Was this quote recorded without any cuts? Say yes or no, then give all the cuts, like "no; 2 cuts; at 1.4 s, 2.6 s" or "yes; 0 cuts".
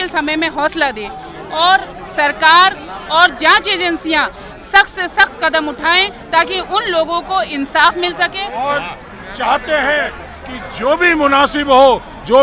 no; 1 cut; at 8.5 s